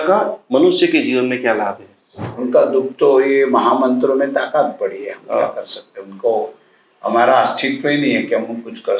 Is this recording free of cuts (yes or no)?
no